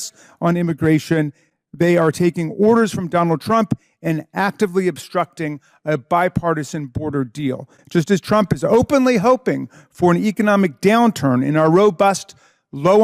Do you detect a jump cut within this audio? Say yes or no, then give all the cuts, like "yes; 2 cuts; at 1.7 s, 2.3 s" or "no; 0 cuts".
no; 0 cuts